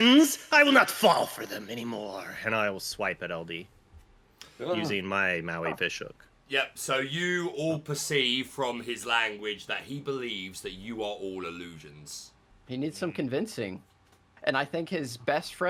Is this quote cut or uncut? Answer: uncut